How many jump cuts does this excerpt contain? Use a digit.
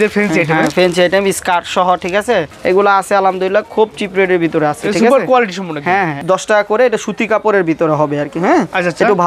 2